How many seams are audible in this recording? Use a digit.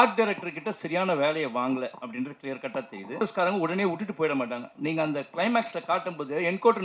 1